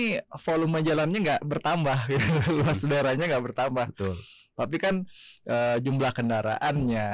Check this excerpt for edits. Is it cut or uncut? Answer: uncut